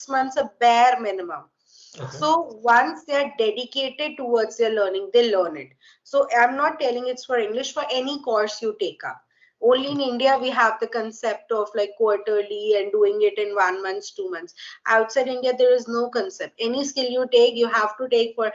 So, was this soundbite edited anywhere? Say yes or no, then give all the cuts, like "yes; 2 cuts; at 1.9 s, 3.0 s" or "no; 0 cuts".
no; 0 cuts